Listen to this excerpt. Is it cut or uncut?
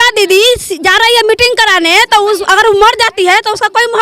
uncut